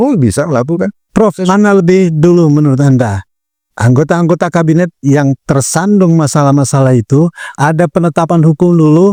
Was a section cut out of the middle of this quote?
no; 0 cuts

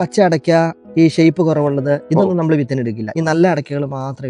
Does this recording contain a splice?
yes; 1 cut; at 3.1 s

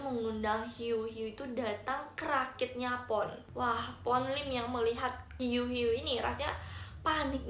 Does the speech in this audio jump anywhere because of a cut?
yes; 2 cuts; at 3.4 s, 5.2 s

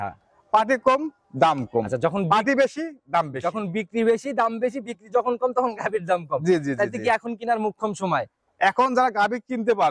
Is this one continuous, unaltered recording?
yes; 0 cuts

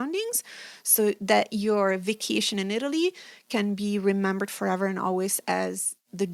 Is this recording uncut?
yes; 0 cuts

